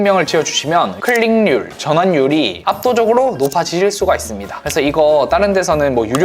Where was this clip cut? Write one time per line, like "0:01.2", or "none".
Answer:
0:01.0